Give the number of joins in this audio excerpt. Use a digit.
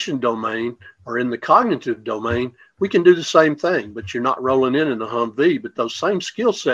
0